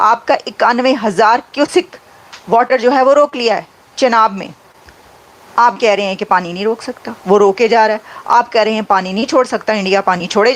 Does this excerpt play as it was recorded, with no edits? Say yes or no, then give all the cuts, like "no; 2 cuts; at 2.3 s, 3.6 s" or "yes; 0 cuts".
yes; 0 cuts